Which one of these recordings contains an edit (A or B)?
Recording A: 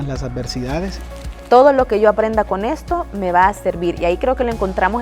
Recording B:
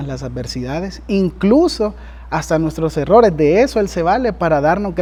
A